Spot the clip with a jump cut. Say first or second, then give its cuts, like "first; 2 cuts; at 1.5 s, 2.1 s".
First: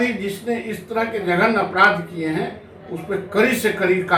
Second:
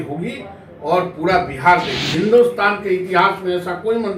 second; 1 cut; at 2.0 s